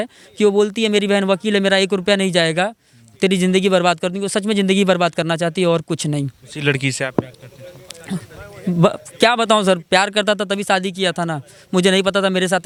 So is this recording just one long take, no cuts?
yes; 0 cuts

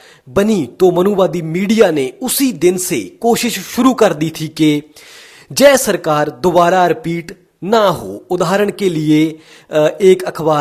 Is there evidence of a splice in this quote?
no; 0 cuts

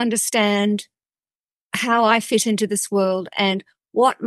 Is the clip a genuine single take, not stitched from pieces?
yes; 0 cuts

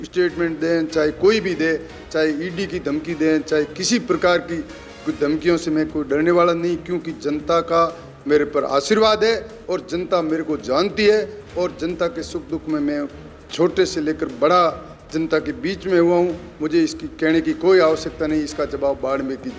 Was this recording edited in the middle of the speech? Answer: no; 0 cuts

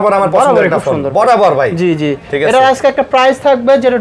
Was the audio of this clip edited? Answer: no; 0 cuts

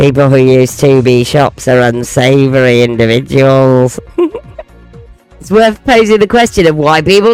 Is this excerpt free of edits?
yes; 0 cuts

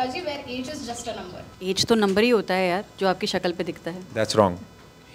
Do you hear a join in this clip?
yes; 1 cut; at 1.5 s

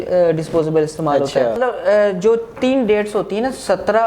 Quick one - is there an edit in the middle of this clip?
yes; 1 cut; at 1.6 s

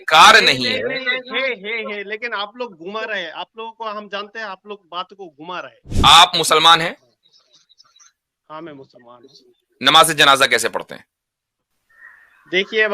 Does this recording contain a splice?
yes; 1 cut; at 5.8 s

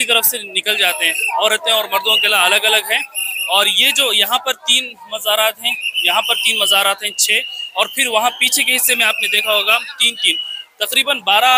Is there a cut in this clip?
no; 0 cuts

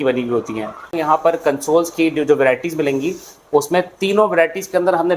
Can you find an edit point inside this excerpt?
yes; 1 cut; at 0.9 s

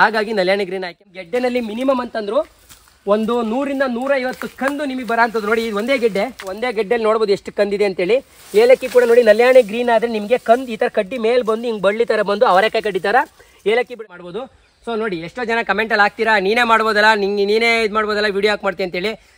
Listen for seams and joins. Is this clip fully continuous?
no; 3 cuts; at 1.0 s, 6.6 s, 14.1 s

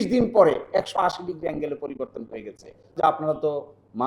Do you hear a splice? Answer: yes; 1 cut; at 3.0 s

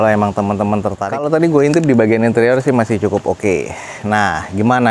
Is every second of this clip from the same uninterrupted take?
no; 1 cut; at 1.0 s

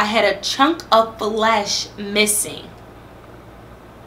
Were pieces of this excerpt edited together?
no; 0 cuts

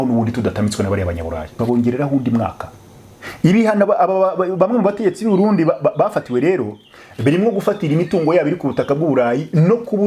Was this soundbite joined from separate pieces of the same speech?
yes; 1 cut; at 1.5 s

